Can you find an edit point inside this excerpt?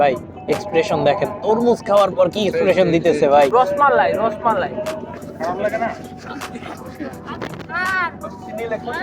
yes; 2 cuts; at 3.5 s, 5.3 s

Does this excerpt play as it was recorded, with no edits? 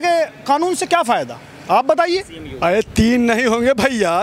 no; 1 cut; at 2.4 s

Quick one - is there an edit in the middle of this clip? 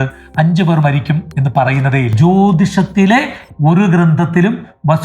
yes; 1 cut; at 2.1 s

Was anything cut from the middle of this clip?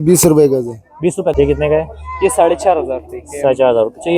yes; 1 cut; at 1.3 s

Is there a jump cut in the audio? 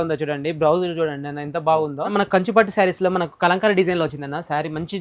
yes; 1 cut; at 2.1 s

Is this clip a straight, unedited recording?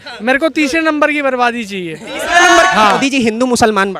no; 1 cut; at 3.0 s

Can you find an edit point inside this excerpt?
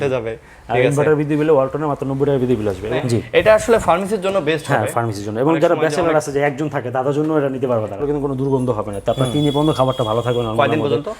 yes; 2 cuts; at 3.0 s, 8.0 s

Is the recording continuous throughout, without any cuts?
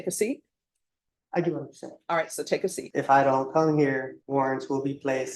no; 2 cuts; at 2.8 s, 4.2 s

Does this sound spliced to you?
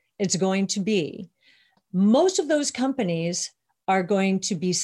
yes; 1 cut; at 1.7 s

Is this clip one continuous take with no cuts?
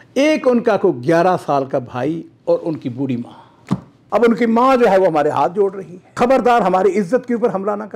no; 2 cuts; at 3.9 s, 6.1 s

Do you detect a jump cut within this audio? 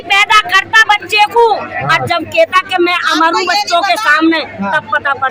no; 0 cuts

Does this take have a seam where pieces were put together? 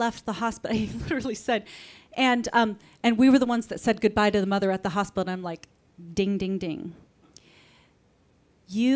no; 0 cuts

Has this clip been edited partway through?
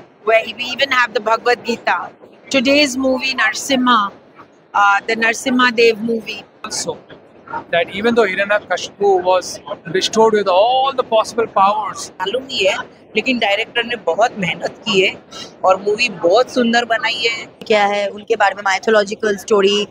yes; 3 cuts; at 6.8 s, 12.2 s, 17.6 s

